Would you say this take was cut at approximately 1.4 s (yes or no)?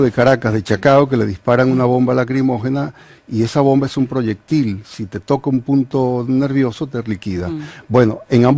yes